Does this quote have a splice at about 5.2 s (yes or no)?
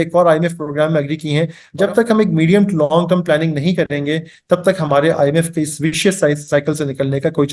no